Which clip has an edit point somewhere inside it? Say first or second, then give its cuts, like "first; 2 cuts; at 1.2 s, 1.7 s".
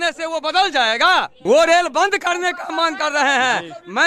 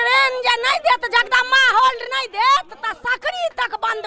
first; 1 cut; at 1.3 s